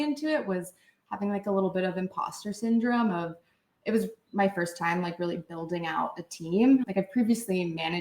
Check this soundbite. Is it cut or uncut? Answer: cut